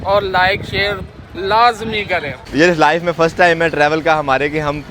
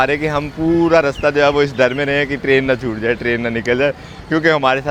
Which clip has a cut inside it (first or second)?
first